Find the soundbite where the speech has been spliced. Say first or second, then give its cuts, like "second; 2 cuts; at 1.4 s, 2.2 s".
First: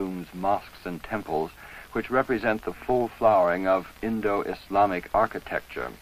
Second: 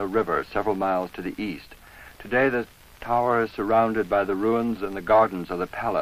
second; 1 cut; at 2.1 s